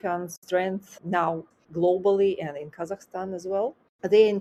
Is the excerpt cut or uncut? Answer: uncut